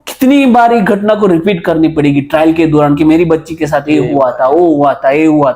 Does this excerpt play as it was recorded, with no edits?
yes; 0 cuts

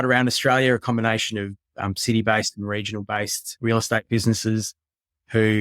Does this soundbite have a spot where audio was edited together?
yes; 1 cut; at 3.4 s

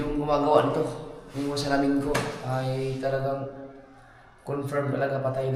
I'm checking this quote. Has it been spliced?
no; 0 cuts

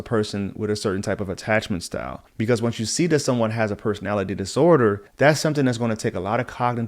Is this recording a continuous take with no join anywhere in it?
no; 2 cuts; at 2.2 s, 5.1 s

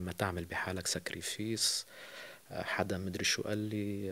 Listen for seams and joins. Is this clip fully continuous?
yes; 0 cuts

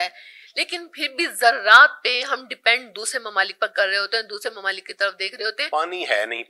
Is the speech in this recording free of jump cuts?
no; 1 cut; at 5.6 s

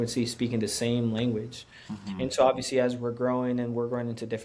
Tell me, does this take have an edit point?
no; 0 cuts

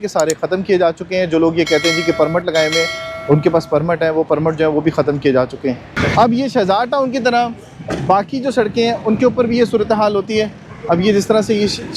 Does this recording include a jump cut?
no; 0 cuts

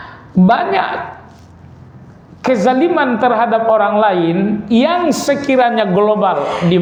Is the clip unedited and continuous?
yes; 0 cuts

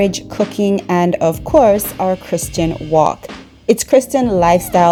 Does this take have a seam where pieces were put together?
no; 0 cuts

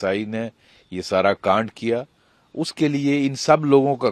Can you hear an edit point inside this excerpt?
no; 0 cuts

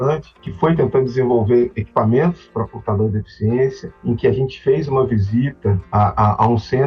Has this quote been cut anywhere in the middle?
no; 0 cuts

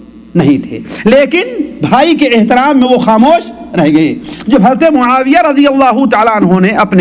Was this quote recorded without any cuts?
yes; 0 cuts

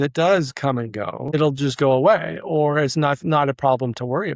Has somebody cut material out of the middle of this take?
yes; 1 cut; at 1.3 s

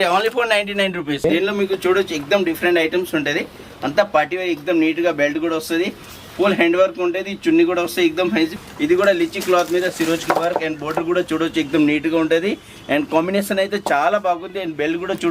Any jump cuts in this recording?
yes; 2 cuts; at 1.2 s, 8.6 s

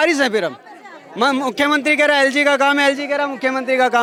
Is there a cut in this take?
no; 0 cuts

